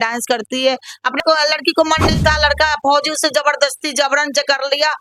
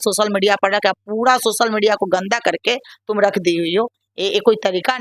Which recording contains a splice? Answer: first; 1 cut; at 1.2 s

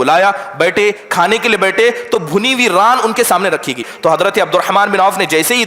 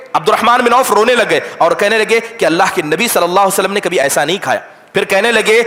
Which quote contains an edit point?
first; 1 cut; at 3.9 s

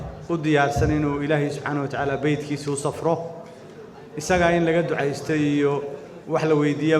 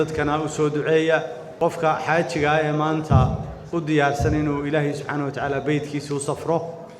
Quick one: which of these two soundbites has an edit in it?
second; 1 cut; at 1.4 s

